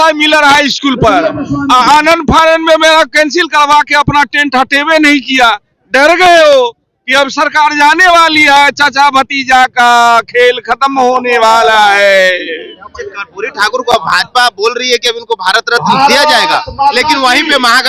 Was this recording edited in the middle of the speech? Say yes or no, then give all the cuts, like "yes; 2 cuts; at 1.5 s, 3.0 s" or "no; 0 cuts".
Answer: no; 0 cuts